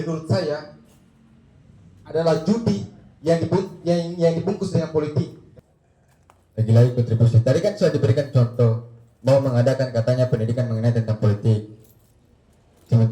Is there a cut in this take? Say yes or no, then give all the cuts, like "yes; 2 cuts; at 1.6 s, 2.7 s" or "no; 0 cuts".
yes; 1 cut; at 5.4 s